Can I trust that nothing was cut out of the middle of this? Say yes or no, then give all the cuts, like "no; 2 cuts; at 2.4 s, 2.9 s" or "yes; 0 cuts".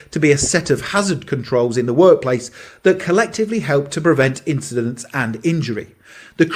yes; 0 cuts